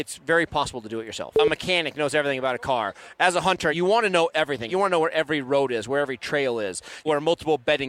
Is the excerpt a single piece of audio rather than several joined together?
no; 4 cuts; at 1.4 s, 3.8 s, 4.7 s, 7.1 s

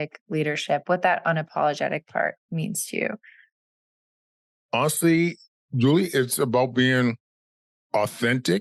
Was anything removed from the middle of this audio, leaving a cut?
no; 0 cuts

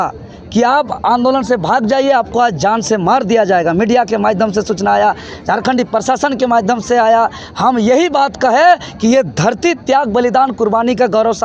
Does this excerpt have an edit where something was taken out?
no; 0 cuts

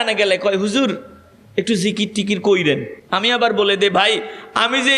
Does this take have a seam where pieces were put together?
yes; 1 cut; at 3.0 s

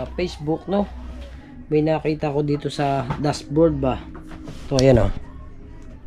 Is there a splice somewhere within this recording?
no; 0 cuts

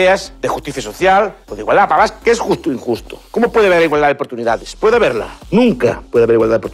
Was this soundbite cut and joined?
no; 0 cuts

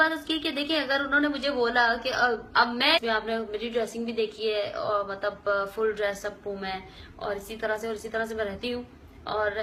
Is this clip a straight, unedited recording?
yes; 0 cuts

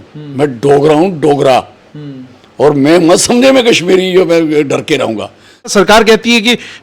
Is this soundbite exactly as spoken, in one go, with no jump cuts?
no; 1 cut; at 5.7 s

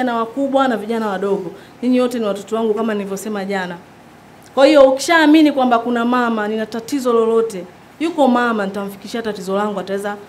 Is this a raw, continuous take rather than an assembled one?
yes; 0 cuts

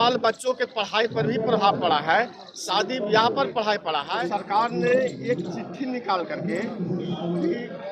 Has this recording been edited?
yes; 1 cut; at 4.1 s

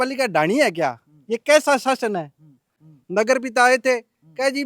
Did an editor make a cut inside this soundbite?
yes; 1 cut; at 2.8 s

